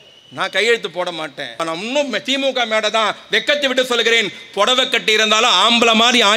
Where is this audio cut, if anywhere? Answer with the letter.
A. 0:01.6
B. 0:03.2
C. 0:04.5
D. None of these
A